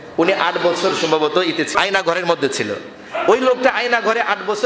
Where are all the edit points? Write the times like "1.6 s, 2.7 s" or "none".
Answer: 1.7 s